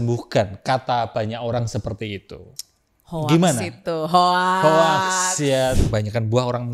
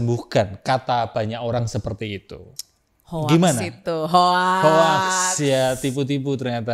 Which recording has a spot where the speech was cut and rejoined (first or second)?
first